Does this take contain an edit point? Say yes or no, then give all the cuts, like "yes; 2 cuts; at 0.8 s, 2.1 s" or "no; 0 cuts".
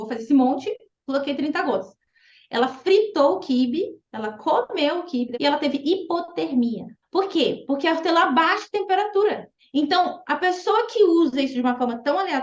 yes; 3 cuts; at 5.3 s, 6.9 s, 9.5 s